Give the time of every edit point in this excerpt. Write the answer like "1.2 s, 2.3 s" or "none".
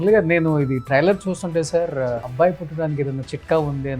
2.3 s